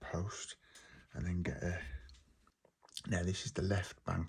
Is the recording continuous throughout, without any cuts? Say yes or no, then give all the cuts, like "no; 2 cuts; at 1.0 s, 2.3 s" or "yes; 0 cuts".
no; 1 cut; at 2.8 s